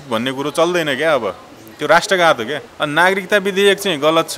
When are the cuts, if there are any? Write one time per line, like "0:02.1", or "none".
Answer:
0:02.6